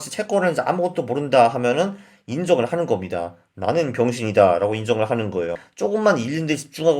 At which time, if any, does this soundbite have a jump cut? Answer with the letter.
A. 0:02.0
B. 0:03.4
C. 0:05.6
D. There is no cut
C